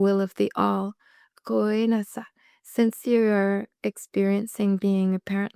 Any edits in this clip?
no; 0 cuts

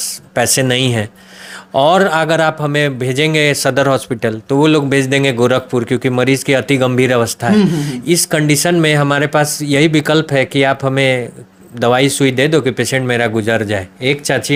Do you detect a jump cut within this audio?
no; 0 cuts

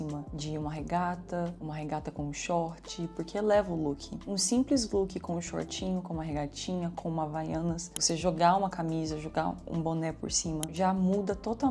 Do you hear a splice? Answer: no; 0 cuts

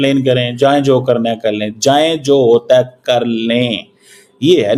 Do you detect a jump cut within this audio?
no; 0 cuts

